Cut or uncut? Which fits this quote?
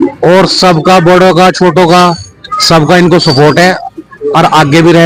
uncut